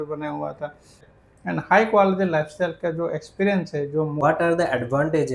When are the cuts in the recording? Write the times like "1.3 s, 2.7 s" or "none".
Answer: 1.1 s, 4.2 s